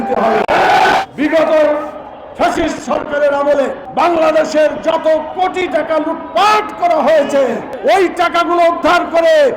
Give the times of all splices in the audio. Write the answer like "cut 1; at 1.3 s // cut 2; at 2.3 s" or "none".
cut 1; at 1.0 s // cut 2; at 3.8 s // cut 3; at 7.7 s